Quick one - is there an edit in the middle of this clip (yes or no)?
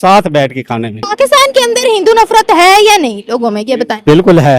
yes